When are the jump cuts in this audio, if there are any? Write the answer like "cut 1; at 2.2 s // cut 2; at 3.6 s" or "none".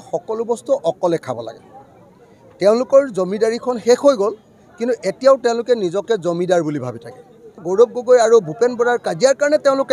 cut 1; at 7.6 s